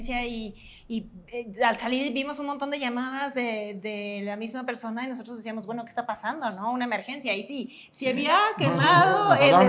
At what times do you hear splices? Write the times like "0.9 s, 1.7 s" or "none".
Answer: none